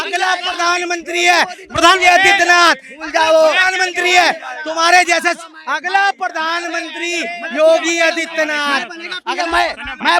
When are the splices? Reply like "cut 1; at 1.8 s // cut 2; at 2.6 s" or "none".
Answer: none